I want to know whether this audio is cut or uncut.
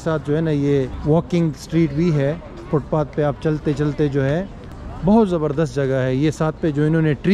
cut